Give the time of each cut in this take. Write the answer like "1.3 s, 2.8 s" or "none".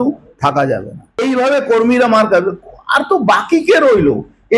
1.2 s